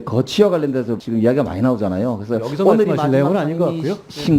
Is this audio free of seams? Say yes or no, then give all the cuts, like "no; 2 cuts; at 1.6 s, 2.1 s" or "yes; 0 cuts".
no; 1 cut; at 1.0 s